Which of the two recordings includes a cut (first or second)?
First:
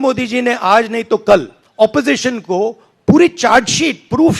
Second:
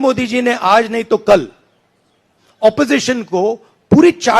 first